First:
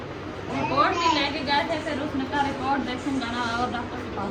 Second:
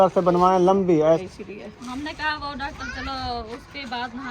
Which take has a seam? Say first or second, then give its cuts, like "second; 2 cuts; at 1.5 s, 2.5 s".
second; 1 cut; at 1.2 s